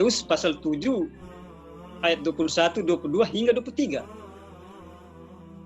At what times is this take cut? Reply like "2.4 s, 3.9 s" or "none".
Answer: 4.1 s